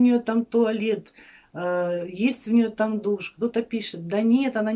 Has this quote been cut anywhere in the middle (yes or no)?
no